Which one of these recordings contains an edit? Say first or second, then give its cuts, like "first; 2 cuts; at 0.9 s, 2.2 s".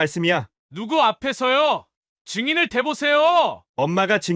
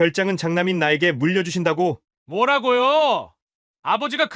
second; 1 cut; at 2.1 s